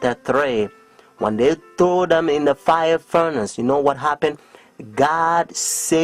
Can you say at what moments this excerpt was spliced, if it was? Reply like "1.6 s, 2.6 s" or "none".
none

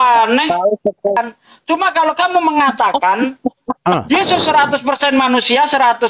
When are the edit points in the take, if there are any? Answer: 1.2 s

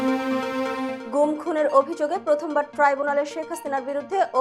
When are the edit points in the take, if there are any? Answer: 0.9 s

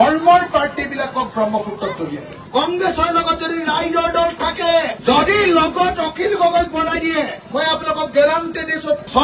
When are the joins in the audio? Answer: 2.4 s, 4.9 s, 7.4 s

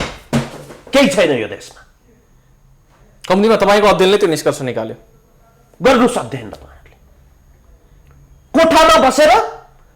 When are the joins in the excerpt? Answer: none

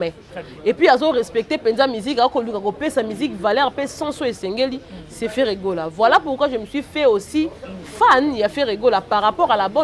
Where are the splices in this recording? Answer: none

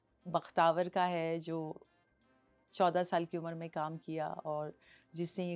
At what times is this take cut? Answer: none

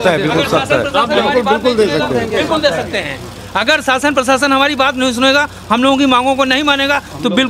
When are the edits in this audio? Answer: none

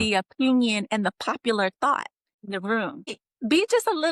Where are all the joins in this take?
2.3 s, 3.2 s

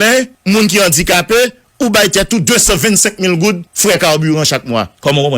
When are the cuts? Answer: 3.7 s

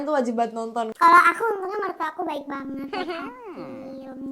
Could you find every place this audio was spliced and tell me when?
0.9 s

